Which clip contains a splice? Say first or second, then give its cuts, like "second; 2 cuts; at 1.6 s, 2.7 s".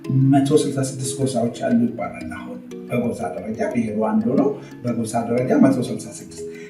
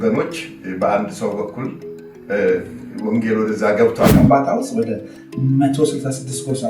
second; 1 cut; at 4.1 s